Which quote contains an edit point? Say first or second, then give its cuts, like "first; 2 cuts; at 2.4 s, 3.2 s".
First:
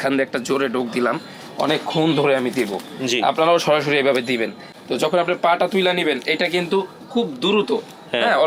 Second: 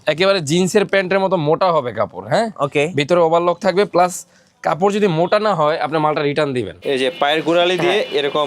second; 1 cut; at 6.7 s